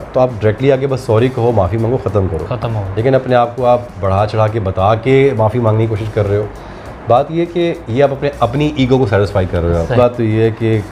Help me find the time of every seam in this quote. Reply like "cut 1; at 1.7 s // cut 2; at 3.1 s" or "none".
cut 1; at 10.0 s